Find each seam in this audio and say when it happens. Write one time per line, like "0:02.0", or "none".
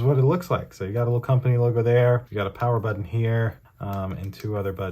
none